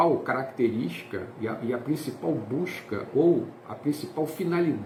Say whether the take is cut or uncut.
uncut